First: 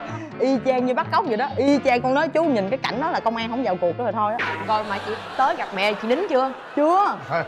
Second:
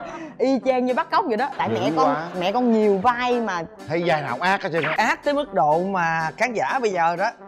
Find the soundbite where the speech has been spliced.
second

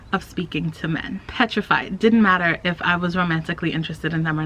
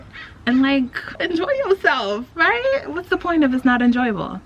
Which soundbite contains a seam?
first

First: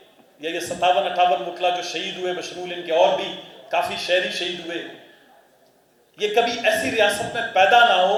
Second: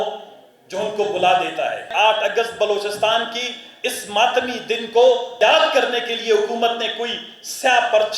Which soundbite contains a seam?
second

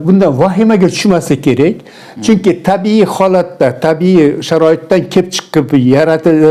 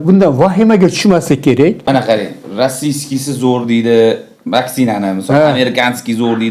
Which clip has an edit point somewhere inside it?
second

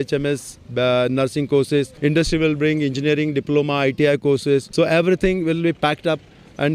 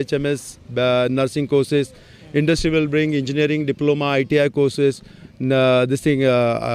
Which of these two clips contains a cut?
first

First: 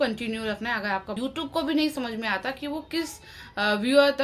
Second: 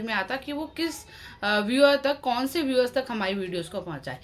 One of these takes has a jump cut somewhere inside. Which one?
first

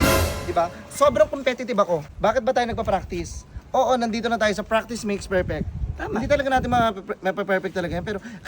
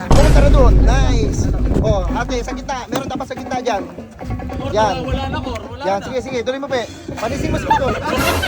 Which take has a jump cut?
first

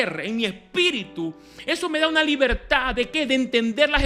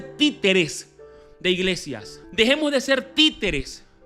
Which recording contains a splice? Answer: second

